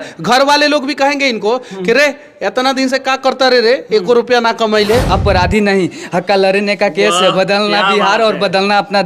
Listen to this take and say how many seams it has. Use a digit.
1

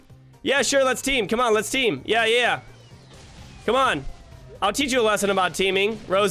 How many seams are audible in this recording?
0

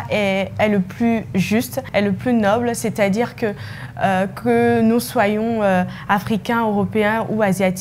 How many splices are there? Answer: 1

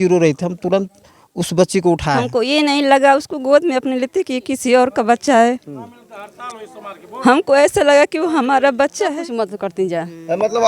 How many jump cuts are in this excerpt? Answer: 2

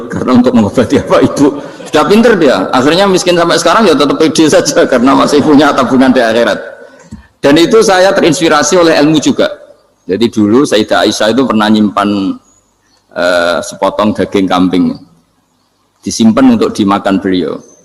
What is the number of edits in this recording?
0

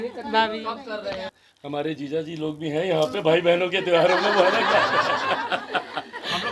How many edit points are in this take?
1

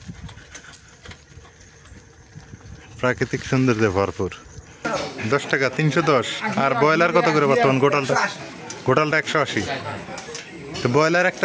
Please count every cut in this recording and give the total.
1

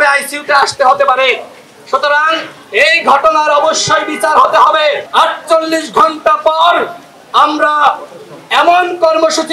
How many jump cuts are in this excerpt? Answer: 1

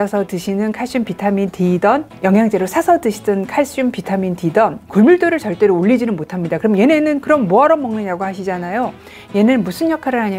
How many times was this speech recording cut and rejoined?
2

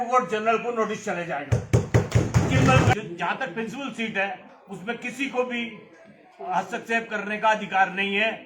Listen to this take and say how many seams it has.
1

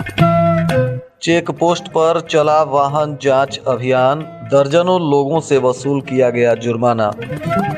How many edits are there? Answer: 1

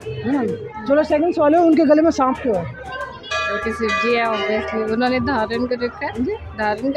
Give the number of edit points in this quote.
0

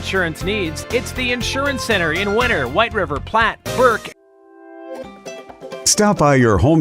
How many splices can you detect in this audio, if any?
1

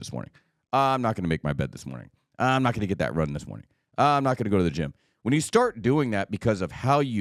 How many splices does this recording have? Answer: 0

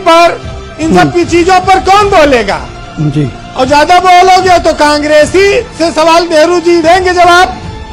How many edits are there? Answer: 0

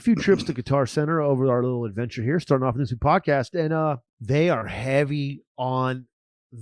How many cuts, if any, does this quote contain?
1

